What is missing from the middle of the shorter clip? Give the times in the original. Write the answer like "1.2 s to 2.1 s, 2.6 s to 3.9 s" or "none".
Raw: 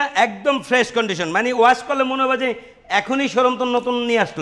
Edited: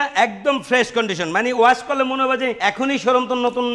2.6 s to 2.9 s

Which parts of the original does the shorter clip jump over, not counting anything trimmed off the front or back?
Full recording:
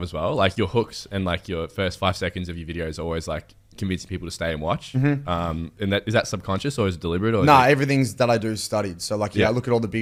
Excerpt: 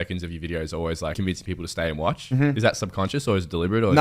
3.4 s to 3.8 s, 5.2 s to 6.1 s

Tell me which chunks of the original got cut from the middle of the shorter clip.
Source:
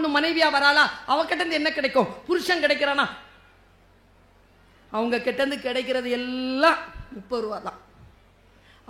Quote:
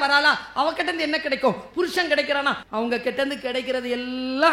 3.2 s to 4.8 s

